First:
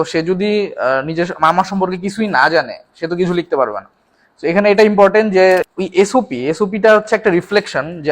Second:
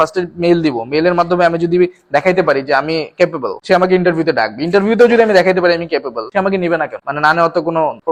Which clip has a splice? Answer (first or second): first